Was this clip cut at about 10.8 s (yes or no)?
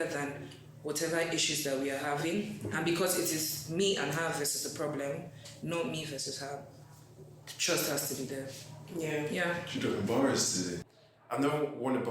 yes